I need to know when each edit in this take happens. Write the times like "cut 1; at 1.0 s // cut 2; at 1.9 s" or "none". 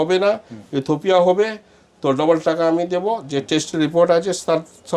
none

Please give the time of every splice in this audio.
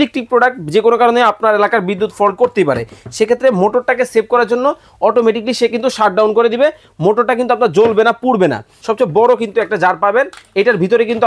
cut 1; at 8.7 s

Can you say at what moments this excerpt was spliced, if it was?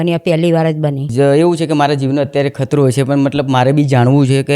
cut 1; at 1.1 s

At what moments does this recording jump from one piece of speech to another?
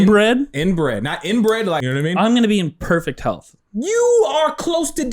cut 1; at 1.8 s

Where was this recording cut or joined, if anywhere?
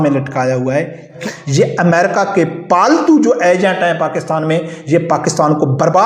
cut 1; at 1.2 s

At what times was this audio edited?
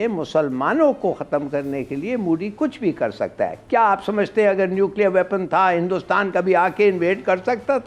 cut 1; at 3.6 s

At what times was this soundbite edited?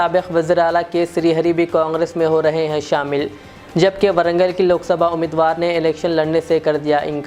none

